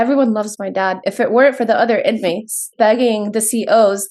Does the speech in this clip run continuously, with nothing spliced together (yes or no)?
no